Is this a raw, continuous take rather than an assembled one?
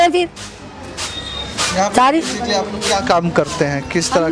yes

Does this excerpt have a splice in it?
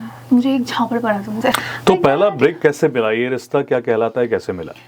yes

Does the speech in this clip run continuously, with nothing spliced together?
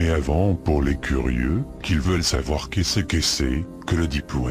yes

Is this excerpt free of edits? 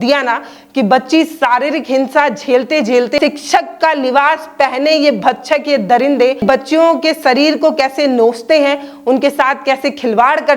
no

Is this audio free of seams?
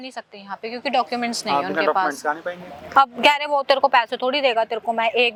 yes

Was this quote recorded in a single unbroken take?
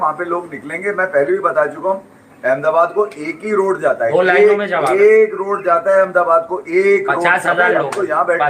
yes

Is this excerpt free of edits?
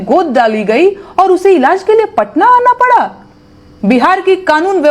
yes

